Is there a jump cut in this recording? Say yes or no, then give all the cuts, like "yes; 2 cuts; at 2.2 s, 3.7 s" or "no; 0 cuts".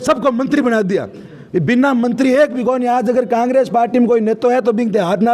no; 0 cuts